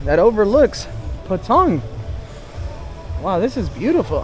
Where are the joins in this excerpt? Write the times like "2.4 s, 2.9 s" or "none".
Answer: none